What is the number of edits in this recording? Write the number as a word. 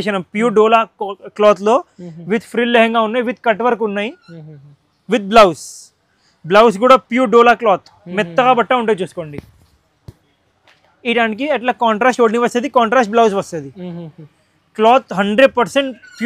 zero